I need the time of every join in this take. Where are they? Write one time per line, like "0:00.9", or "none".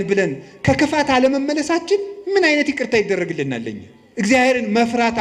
0:04.3